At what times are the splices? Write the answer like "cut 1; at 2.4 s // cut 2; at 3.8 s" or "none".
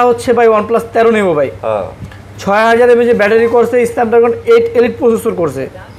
none